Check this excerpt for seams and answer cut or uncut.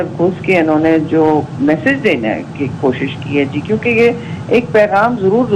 uncut